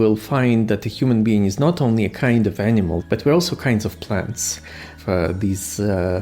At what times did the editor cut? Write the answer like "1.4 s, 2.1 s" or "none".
3.0 s, 4.9 s